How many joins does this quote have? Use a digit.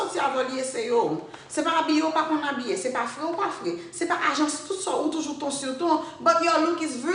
0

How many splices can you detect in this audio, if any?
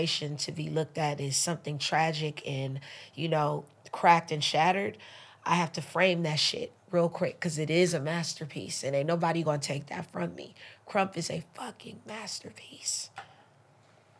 0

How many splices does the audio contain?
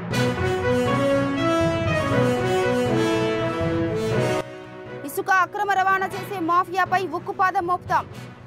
0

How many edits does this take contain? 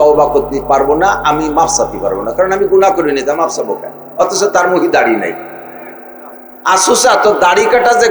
0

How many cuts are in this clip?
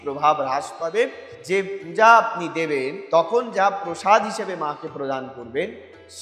1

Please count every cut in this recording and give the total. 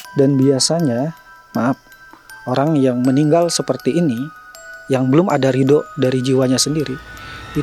0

